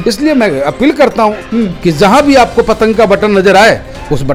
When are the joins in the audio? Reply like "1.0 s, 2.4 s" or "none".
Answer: none